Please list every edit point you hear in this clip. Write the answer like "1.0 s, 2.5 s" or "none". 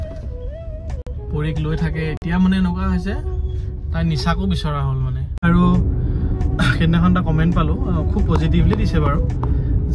5.4 s